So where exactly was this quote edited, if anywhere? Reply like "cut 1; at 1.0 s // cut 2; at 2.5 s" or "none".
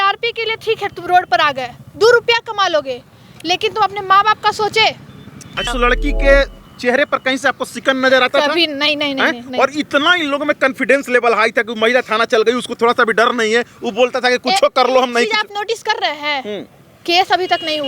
cut 1; at 5.7 s